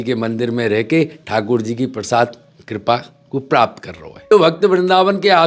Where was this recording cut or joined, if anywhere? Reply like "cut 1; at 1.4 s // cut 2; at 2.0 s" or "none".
cut 1; at 4.3 s